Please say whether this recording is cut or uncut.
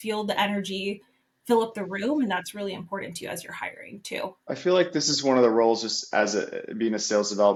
uncut